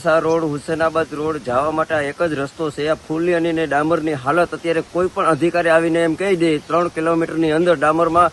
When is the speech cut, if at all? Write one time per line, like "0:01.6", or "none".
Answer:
none